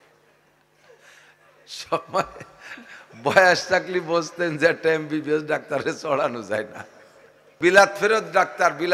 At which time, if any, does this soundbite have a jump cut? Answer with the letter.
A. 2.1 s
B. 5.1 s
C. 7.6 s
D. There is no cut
C